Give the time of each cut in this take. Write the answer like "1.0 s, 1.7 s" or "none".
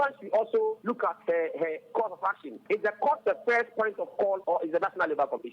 0.8 s, 2.6 s, 4.4 s